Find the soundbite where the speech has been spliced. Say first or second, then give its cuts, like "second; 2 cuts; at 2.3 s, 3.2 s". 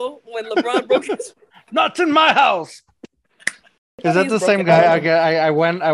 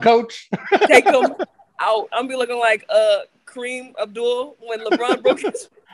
first; 1 cut; at 4.0 s